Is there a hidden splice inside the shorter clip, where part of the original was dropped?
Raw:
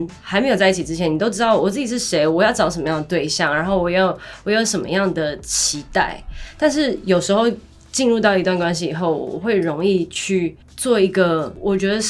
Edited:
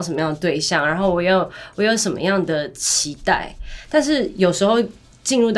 no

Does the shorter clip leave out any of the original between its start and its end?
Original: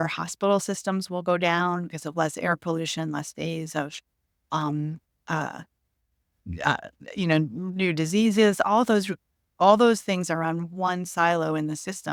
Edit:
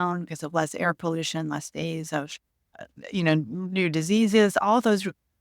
yes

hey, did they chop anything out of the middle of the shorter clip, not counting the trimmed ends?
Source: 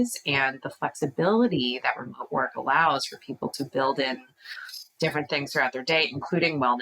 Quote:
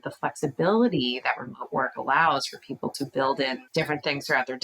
yes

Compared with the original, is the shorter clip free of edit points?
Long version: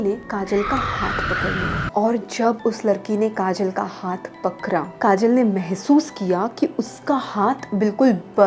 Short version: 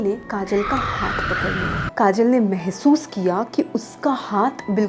no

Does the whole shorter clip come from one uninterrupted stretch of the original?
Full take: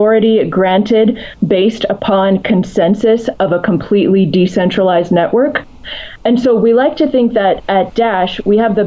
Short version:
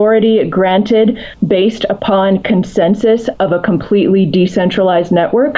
yes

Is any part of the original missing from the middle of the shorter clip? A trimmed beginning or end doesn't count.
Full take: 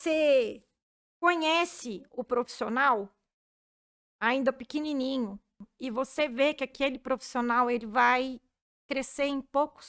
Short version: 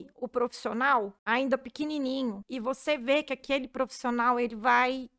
yes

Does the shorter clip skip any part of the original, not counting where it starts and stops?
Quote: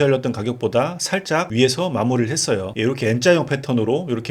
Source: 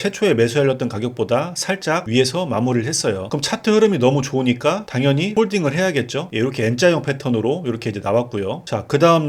yes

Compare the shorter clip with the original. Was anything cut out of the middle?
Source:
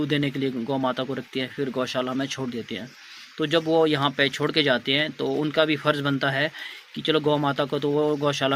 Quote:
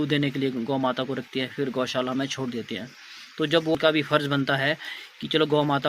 yes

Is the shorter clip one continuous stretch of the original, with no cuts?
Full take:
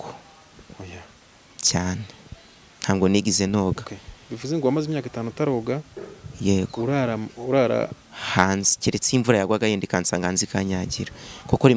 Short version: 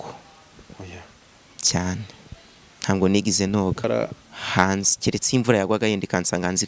no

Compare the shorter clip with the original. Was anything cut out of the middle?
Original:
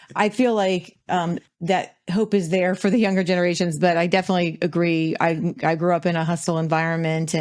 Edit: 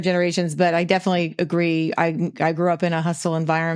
no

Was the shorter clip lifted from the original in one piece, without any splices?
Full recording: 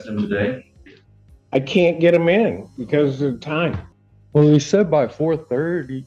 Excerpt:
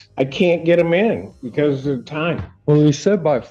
no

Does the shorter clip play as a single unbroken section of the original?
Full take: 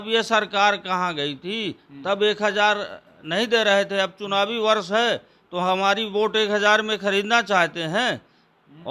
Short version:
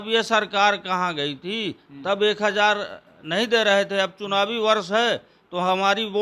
yes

